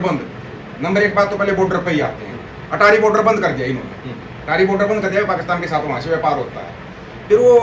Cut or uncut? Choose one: uncut